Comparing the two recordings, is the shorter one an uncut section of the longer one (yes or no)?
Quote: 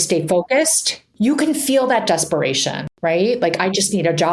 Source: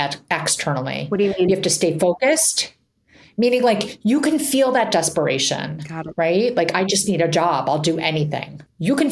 no